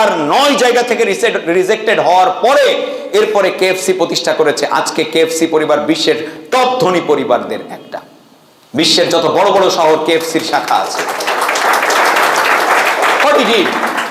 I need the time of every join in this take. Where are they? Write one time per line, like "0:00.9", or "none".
none